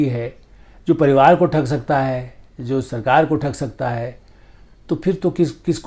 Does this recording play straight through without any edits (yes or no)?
yes